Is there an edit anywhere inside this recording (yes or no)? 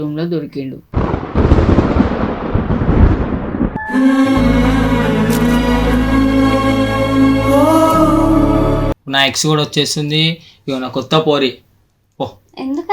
yes